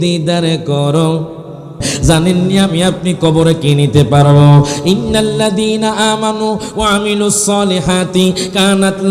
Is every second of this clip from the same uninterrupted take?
no; 1 cut; at 1.9 s

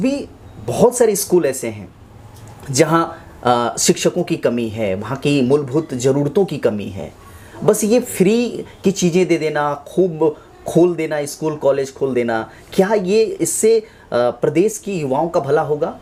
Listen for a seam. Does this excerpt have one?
no; 0 cuts

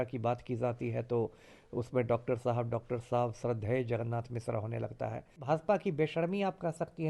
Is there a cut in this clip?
yes; 1 cut; at 5.4 s

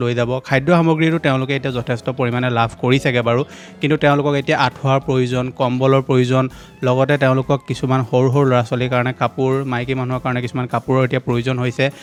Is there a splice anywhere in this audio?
no; 0 cuts

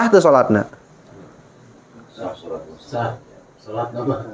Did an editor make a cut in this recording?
no; 0 cuts

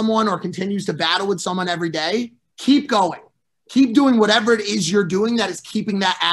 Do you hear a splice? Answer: yes; 1 cut; at 2.4 s

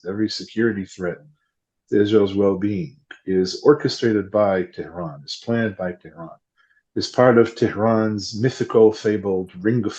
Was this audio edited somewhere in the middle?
no; 0 cuts

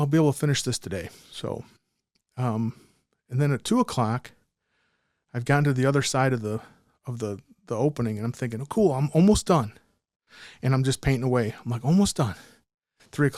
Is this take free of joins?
yes; 0 cuts

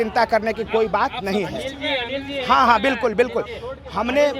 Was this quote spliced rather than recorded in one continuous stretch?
no; 0 cuts

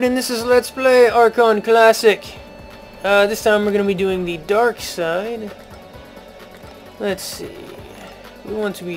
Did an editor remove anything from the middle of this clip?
no; 0 cuts

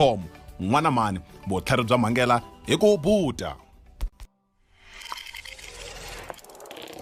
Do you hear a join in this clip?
no; 0 cuts

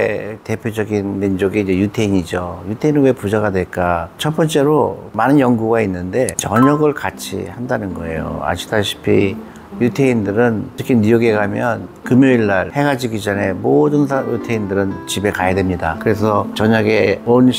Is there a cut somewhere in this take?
no; 0 cuts

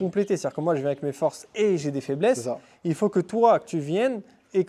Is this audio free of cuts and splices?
yes; 0 cuts

